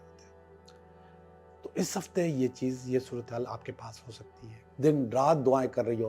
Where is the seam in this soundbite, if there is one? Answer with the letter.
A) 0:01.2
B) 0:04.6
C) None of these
B